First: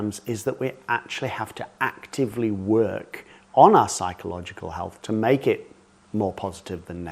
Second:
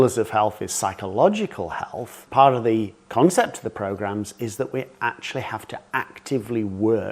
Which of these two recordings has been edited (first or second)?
second